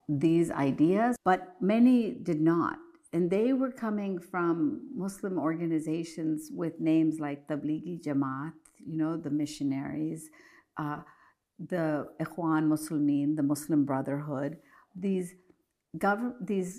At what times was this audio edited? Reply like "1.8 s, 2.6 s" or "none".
1.2 s